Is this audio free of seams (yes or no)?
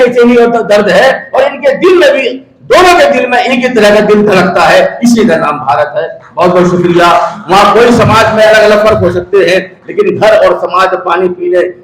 yes